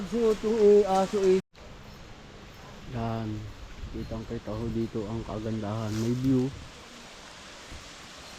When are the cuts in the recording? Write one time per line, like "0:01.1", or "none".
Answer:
0:01.4